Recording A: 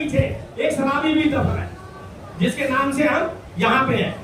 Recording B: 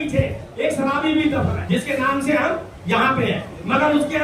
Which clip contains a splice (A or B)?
B